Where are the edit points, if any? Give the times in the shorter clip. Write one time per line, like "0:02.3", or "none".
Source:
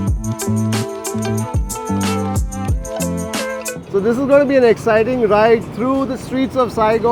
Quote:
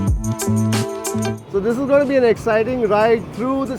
0:01.4